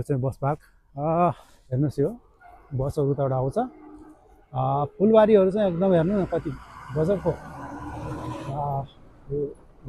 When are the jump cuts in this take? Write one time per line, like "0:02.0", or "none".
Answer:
0:01.5